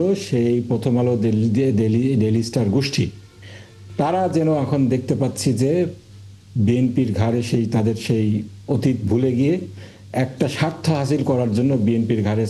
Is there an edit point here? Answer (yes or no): no